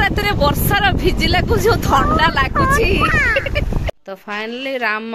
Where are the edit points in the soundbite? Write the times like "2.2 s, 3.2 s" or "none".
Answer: 3.9 s